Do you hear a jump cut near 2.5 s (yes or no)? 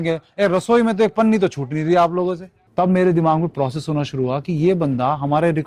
yes